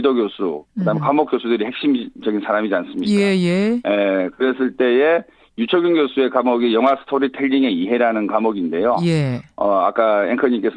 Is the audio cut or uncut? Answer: cut